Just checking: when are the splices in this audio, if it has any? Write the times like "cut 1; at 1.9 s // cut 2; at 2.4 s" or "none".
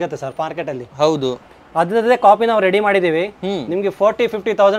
none